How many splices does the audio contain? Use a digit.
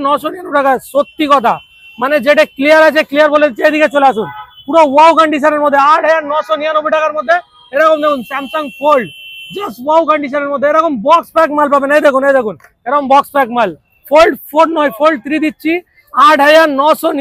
0